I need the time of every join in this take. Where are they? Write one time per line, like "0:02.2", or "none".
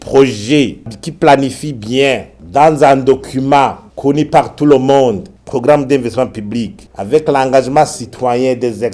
0:00.9